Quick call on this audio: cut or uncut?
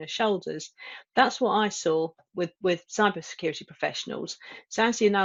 uncut